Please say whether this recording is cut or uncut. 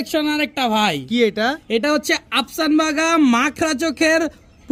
uncut